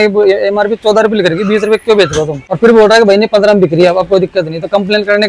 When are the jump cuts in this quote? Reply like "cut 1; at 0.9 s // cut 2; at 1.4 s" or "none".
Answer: cut 1; at 2.4 s